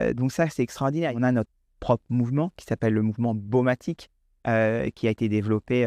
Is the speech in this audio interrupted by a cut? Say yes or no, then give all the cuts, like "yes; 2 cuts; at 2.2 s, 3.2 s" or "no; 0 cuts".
yes; 1 cut; at 1.2 s